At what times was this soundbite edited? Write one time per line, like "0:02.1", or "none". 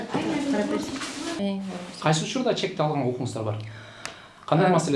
0:01.4